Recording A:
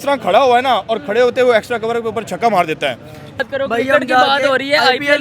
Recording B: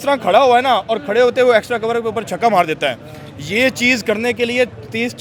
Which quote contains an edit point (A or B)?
A